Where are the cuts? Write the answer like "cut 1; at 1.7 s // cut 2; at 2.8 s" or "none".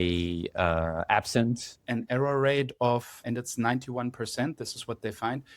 cut 1; at 1.7 s